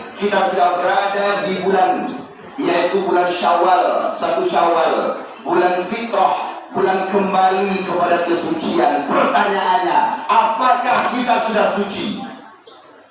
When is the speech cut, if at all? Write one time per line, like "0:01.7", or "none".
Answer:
none